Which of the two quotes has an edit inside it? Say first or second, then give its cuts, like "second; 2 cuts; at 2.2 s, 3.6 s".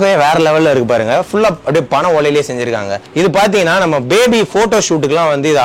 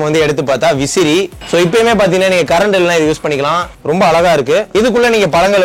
second; 3 cuts; at 1.4 s, 3.7 s, 4.7 s